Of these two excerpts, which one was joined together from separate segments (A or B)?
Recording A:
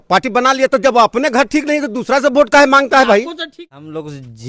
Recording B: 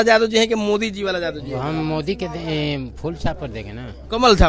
A